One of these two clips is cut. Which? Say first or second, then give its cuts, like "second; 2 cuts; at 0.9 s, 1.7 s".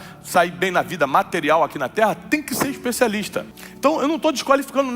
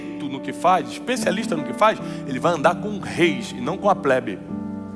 first; 1 cut; at 3.6 s